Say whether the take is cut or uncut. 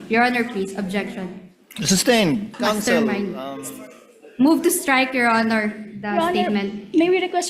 cut